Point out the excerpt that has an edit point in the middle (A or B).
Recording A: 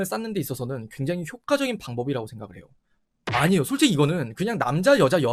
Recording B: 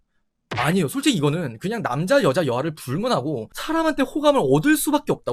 B